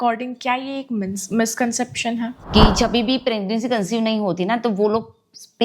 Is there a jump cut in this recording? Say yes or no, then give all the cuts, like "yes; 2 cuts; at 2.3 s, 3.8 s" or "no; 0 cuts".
yes; 1 cut; at 2.4 s